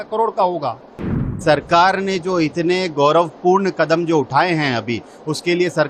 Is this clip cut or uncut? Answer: cut